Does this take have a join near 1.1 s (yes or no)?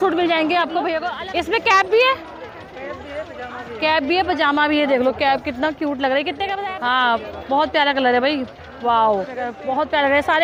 yes